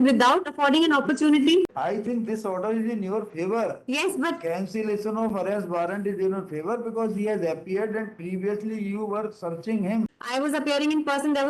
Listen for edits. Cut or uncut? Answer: cut